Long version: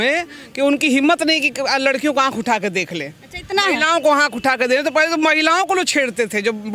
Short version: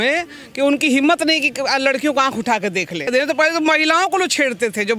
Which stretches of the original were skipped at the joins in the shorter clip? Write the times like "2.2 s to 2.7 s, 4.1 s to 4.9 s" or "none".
3.1 s to 4.6 s